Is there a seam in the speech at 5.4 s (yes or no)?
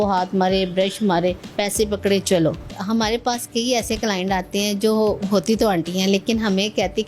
no